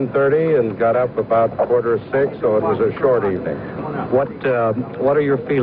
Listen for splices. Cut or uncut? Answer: uncut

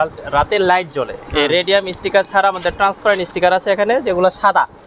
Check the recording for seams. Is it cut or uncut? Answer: uncut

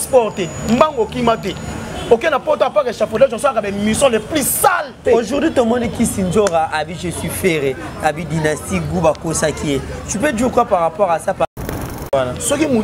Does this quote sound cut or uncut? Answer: cut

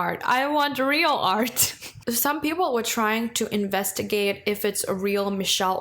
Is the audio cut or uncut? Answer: cut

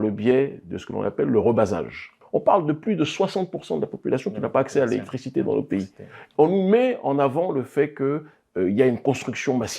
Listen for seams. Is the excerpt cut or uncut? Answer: cut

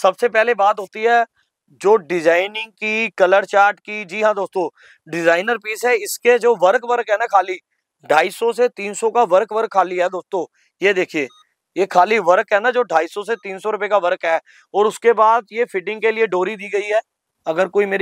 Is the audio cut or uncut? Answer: uncut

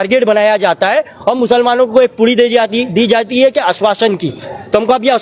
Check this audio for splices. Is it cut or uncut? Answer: uncut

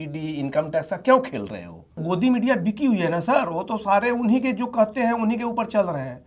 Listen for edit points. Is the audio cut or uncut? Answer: cut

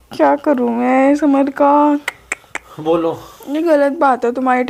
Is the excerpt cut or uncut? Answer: uncut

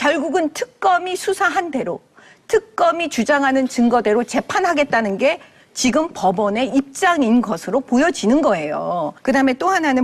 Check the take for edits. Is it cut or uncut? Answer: uncut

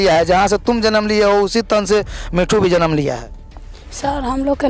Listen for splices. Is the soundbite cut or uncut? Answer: uncut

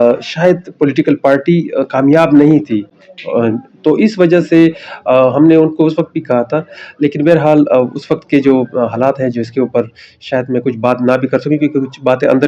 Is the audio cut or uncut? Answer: uncut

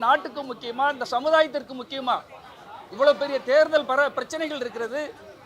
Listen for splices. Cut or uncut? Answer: uncut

